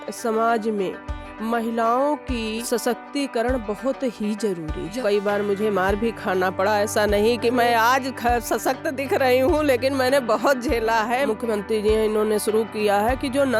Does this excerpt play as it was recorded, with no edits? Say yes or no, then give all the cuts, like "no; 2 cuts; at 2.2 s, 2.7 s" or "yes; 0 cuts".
no; 3 cuts; at 2.6 s, 5.0 s, 11.3 s